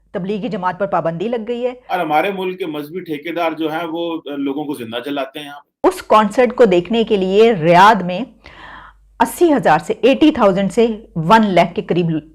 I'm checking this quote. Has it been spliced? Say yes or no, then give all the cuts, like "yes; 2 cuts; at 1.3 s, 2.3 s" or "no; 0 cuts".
yes; 2 cuts; at 1.8 s, 5.8 s